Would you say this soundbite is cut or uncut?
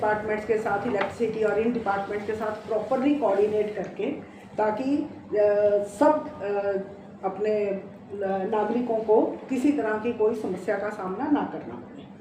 uncut